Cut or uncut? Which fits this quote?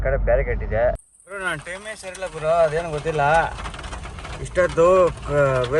cut